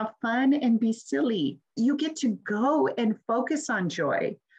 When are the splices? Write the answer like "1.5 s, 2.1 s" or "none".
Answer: 1.7 s